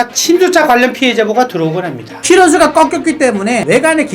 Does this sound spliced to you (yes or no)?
yes